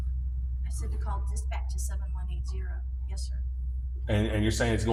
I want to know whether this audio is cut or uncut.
uncut